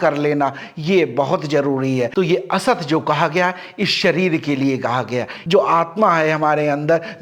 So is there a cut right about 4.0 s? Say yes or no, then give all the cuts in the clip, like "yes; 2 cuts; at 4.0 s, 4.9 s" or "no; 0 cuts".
no; 2 cuts; at 2.1 s, 5.3 s